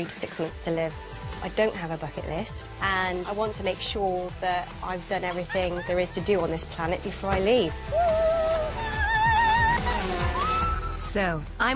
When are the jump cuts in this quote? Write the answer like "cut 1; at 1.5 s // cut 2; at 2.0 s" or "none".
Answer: cut 1; at 0.9 s

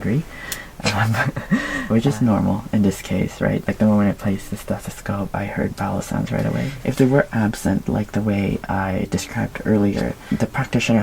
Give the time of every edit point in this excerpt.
cut 1; at 1.8 s // cut 2; at 6.7 s // cut 3; at 10.2 s

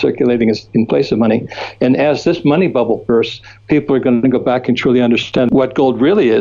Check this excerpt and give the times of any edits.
cut 1; at 5.5 s

